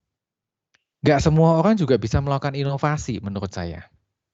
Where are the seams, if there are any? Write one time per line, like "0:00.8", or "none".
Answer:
none